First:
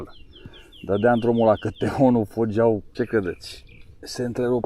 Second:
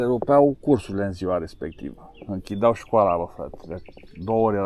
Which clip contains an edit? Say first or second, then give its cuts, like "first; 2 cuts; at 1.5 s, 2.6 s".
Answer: first; 1 cut; at 2.9 s